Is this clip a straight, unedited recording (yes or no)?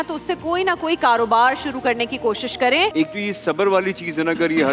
no